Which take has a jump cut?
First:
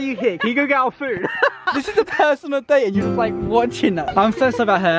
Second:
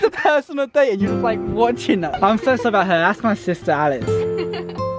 second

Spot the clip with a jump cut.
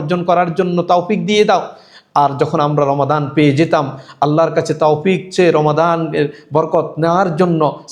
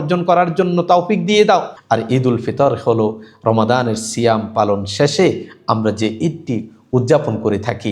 second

